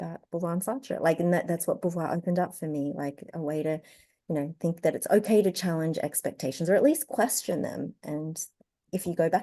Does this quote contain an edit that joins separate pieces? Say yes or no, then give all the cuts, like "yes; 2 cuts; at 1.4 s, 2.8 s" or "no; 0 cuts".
no; 0 cuts